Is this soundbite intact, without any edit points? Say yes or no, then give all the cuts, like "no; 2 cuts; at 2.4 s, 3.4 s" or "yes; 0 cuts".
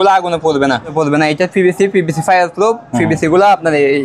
no; 1 cut; at 0.9 s